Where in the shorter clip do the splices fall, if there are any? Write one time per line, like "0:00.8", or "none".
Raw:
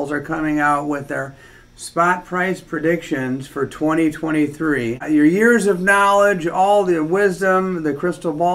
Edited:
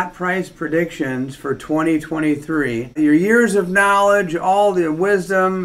none